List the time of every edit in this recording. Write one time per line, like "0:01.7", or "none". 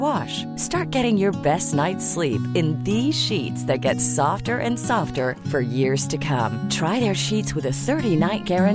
none